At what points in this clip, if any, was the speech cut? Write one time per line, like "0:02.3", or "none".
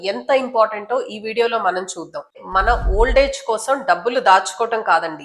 0:02.4